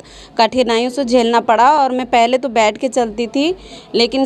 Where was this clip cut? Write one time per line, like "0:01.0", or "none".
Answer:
none

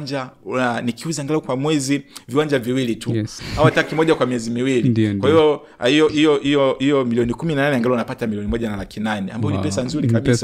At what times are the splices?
0:03.4

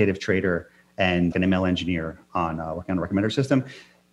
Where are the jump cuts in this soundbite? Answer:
0:01.3

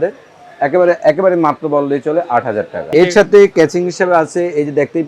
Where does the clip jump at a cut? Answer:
0:02.8

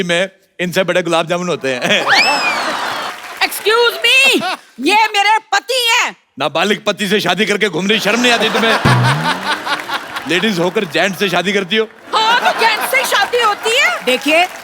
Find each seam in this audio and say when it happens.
0:03.1

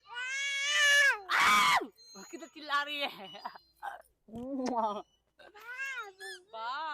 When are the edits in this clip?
none

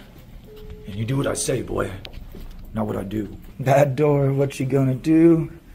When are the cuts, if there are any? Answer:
0:03.4

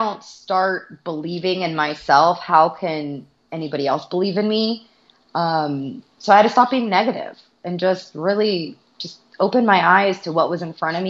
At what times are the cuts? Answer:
none

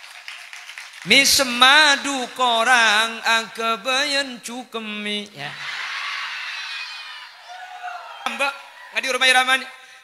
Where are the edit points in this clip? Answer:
0:08.3

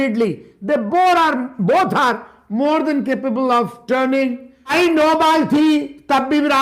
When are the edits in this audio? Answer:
0:04.7

